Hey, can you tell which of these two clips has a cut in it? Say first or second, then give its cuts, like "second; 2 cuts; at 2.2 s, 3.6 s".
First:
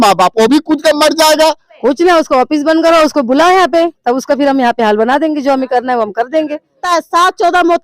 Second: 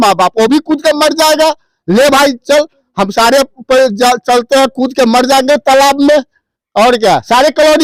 first; 2 cuts; at 1.7 s, 6.8 s